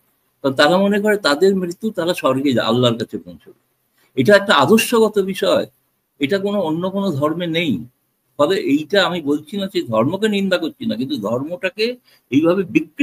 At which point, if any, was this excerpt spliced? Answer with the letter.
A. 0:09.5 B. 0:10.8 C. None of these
C